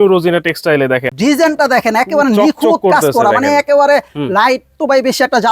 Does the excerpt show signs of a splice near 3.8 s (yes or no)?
no